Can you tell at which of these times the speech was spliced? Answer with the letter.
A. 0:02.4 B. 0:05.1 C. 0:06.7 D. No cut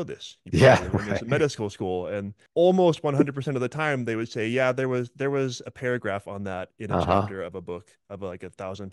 A